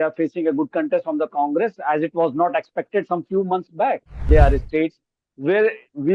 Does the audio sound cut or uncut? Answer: cut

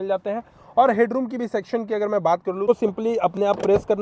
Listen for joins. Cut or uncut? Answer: cut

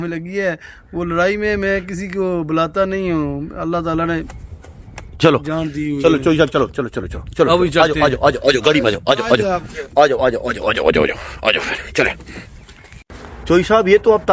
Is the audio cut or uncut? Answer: uncut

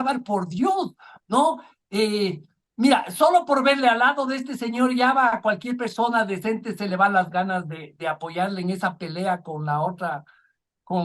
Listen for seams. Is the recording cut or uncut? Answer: uncut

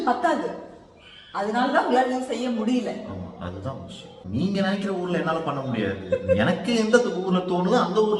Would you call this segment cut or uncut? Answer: cut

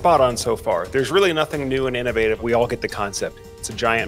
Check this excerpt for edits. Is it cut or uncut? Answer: cut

